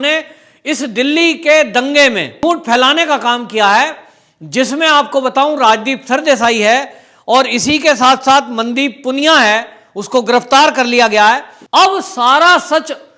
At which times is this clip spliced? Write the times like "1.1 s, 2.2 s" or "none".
2.3 s, 11.5 s